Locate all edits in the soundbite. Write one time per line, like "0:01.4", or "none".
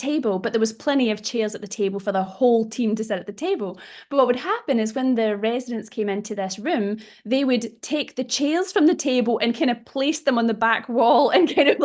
none